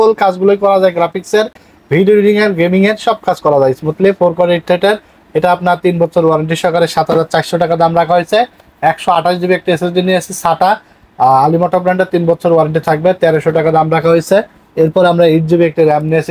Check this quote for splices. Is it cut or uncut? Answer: uncut